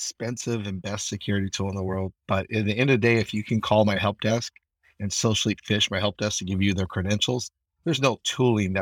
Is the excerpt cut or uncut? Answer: uncut